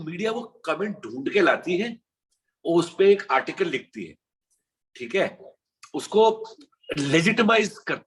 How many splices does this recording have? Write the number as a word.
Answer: zero